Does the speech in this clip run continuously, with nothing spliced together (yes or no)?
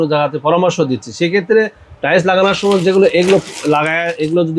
yes